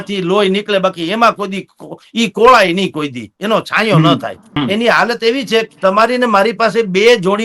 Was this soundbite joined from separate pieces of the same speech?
yes; 1 cut; at 4.4 s

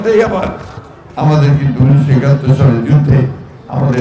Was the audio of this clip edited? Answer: no; 0 cuts

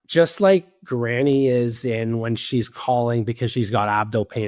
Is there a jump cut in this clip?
no; 0 cuts

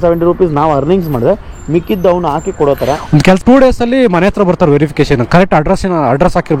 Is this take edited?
yes; 1 cut; at 3.4 s

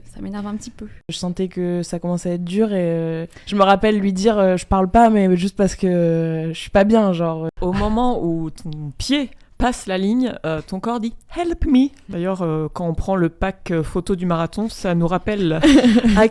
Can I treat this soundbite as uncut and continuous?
no; 3 cuts; at 1.2 s, 7.5 s, 12.0 s

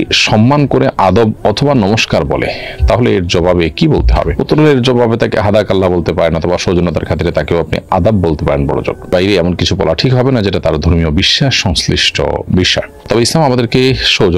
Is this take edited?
no; 0 cuts

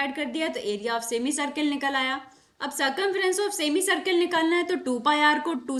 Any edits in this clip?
no; 0 cuts

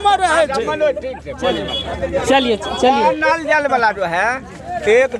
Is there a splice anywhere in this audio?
no; 0 cuts

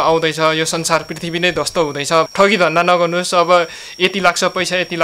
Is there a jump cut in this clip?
yes; 1 cut; at 2.3 s

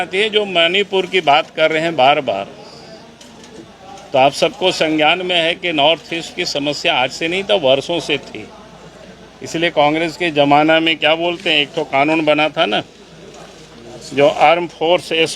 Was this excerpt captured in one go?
yes; 0 cuts

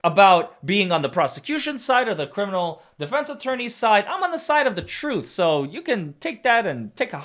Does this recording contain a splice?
no; 0 cuts

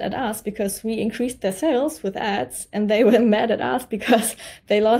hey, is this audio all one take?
yes; 0 cuts

